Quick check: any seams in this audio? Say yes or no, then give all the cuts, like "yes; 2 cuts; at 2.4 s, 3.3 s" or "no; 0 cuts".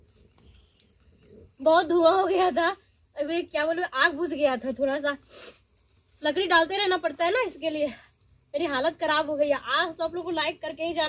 no; 0 cuts